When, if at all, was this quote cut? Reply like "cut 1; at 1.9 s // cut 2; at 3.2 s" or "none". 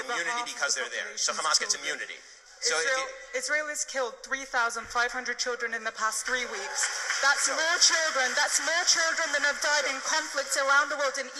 none